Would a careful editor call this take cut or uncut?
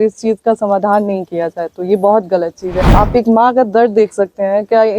cut